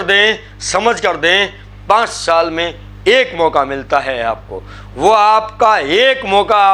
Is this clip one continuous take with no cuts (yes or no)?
yes